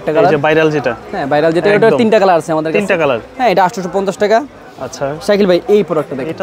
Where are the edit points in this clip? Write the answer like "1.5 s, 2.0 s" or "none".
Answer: none